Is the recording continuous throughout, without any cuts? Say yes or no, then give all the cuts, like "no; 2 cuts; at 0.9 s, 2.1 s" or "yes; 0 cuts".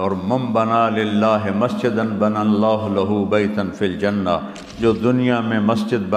yes; 0 cuts